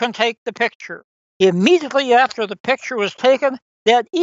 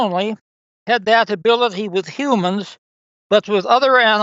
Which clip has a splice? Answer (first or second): first